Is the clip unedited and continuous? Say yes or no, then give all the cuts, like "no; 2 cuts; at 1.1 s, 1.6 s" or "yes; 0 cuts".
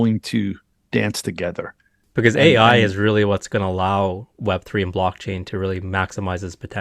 no; 1 cut; at 2.0 s